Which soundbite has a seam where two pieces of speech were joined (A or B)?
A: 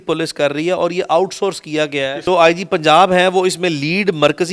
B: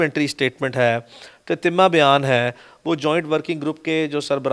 A